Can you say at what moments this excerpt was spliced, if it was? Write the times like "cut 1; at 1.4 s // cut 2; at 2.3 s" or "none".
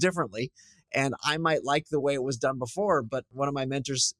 cut 1; at 3.3 s